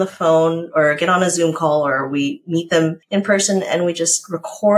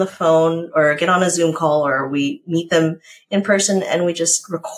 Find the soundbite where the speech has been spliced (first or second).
first